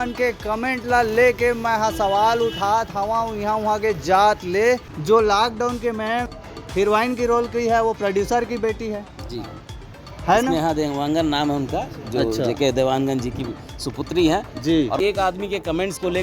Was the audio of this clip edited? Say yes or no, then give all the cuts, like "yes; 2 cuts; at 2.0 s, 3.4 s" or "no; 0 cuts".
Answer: yes; 2 cuts; at 4.9 s, 15.0 s